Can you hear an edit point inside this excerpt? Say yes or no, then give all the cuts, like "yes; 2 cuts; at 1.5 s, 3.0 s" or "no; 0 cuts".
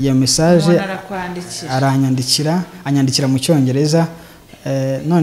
no; 0 cuts